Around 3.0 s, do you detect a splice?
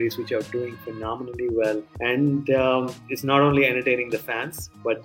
yes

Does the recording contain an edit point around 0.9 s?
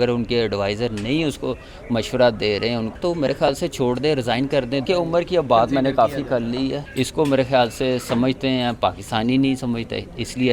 no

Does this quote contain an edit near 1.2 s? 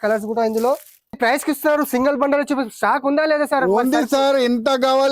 yes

